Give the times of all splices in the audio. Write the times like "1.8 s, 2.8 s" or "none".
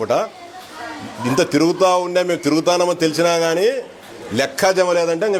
none